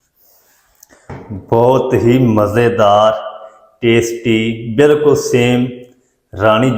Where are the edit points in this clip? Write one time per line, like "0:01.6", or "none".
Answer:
none